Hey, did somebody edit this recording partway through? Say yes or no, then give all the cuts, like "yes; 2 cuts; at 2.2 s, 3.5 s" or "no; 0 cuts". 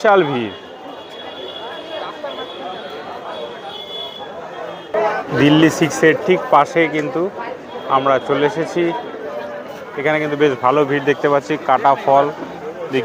no; 0 cuts